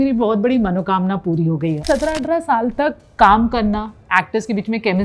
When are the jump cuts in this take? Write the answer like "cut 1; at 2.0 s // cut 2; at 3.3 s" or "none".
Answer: cut 1; at 1.8 s